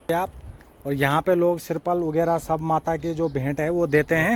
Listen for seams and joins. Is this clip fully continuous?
yes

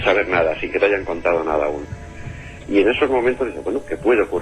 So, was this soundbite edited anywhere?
yes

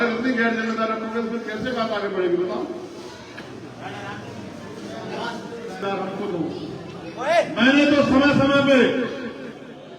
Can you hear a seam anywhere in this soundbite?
yes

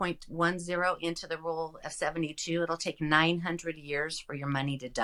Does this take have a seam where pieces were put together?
no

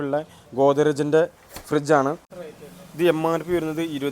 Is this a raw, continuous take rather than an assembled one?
no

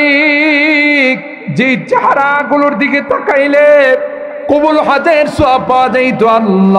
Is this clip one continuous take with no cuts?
no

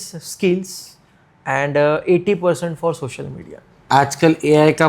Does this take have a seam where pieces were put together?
yes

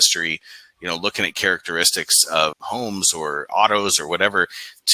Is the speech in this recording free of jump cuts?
no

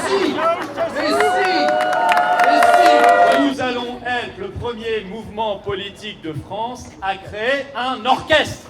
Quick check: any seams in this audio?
yes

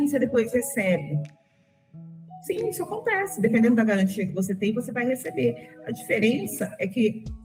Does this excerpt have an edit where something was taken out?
no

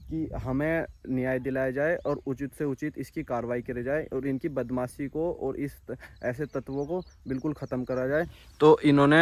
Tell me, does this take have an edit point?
no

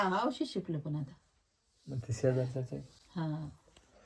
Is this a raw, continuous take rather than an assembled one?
yes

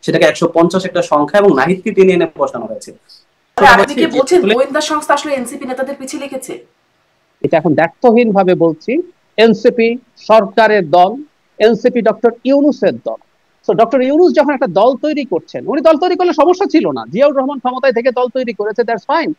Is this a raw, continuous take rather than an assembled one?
no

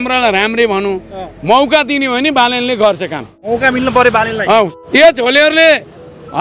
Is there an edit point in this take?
yes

